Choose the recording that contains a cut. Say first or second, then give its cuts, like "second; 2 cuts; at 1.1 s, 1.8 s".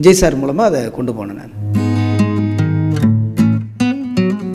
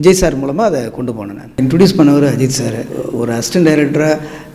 second; 2 cuts; at 1.6 s, 3.0 s